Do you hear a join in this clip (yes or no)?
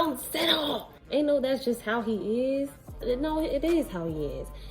yes